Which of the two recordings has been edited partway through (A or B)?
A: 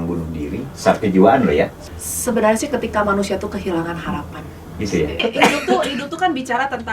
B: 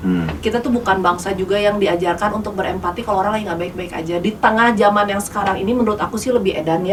A